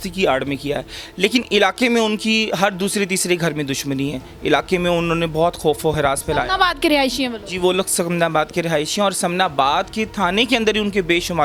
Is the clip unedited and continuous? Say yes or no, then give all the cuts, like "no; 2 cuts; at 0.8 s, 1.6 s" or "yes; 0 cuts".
yes; 0 cuts